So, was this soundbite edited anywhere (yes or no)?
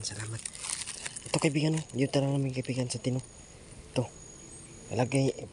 no